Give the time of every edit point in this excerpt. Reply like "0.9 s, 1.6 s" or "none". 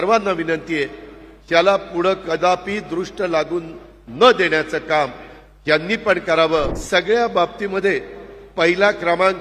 6.8 s